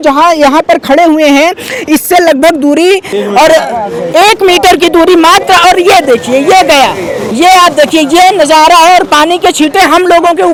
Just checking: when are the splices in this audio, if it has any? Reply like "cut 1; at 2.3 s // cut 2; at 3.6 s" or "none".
none